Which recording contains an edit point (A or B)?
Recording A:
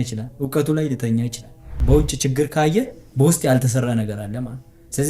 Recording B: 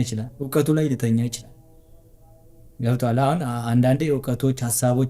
A